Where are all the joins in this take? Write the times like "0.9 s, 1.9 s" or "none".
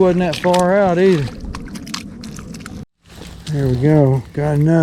2.8 s